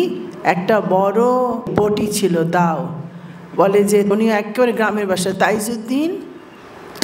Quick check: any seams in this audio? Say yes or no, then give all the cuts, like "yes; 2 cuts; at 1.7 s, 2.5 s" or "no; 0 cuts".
yes; 2 cuts; at 1.7 s, 4.1 s